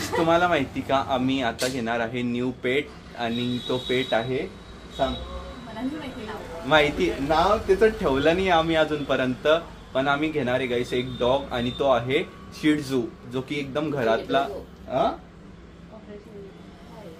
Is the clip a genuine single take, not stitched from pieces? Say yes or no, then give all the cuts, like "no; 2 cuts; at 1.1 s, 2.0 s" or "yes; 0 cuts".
yes; 0 cuts